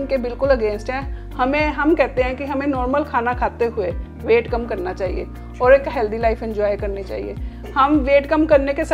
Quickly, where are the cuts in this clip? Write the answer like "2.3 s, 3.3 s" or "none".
none

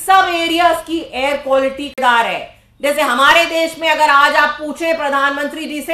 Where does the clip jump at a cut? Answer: 2.0 s

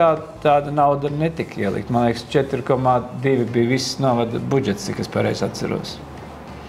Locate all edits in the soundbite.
none

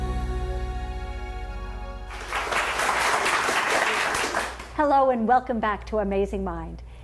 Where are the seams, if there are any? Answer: 2.0 s

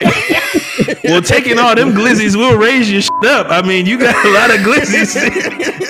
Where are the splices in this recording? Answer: none

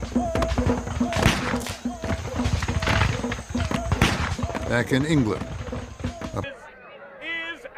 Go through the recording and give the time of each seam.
none

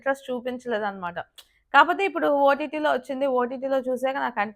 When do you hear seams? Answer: none

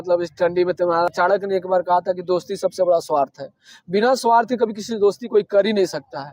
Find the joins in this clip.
1.1 s

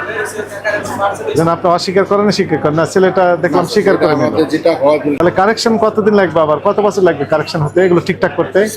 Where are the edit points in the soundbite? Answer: 5.1 s

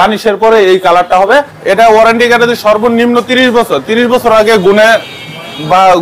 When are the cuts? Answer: 1.5 s

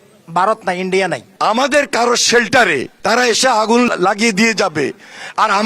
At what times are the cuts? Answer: 1.3 s, 2.9 s, 3.9 s

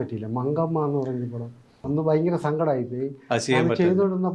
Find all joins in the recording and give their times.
1.7 s

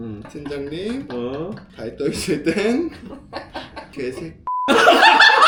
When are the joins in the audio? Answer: none

